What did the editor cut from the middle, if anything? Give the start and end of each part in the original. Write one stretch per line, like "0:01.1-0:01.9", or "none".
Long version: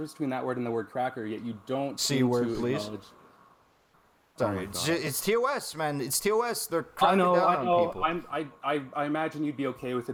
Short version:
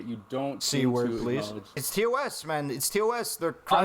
0:03.2-0:05.1